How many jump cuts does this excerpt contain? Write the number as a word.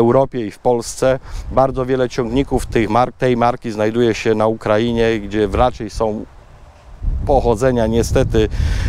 zero